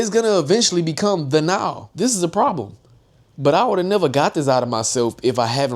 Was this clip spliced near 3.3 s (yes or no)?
no